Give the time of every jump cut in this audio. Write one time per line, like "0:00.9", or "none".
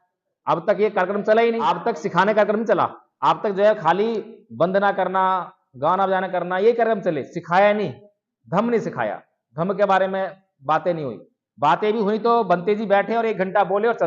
0:01.7
0:03.0